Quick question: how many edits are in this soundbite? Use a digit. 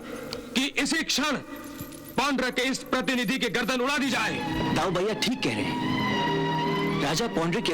1